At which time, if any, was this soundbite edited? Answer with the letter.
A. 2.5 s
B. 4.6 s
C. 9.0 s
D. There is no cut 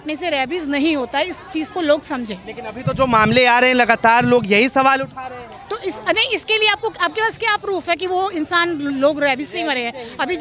D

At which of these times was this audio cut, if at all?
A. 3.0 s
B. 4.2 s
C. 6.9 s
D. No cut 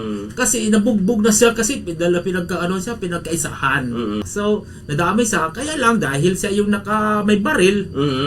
B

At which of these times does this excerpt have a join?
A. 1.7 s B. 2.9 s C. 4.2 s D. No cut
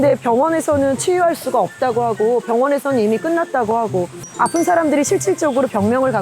C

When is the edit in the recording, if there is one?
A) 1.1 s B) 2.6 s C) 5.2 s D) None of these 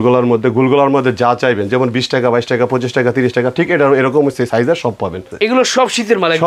C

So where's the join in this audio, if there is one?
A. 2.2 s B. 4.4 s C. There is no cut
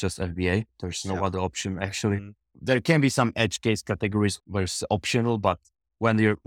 B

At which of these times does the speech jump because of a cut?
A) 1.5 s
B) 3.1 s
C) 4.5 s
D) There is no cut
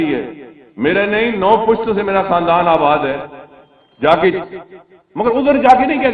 D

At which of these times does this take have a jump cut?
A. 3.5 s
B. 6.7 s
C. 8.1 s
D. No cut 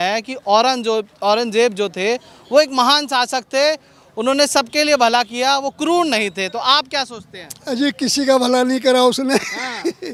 D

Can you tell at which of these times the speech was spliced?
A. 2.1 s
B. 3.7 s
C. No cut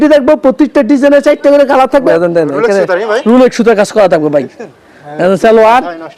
A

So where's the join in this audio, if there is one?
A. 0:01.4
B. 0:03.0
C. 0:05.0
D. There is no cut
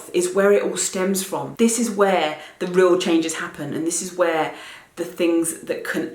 A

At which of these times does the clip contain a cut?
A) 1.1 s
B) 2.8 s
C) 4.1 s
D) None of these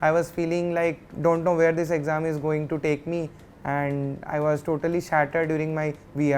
A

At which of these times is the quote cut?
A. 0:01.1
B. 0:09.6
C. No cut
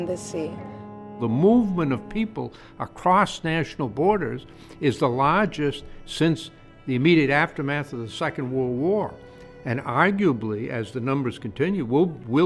A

